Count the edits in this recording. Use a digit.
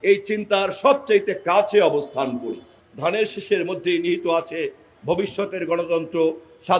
1